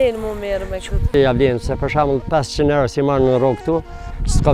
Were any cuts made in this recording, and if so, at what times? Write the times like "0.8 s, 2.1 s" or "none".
1.0 s